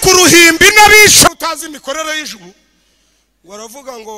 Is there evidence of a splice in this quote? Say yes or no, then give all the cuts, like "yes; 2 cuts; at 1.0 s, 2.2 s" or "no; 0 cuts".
yes; 1 cut; at 1.3 s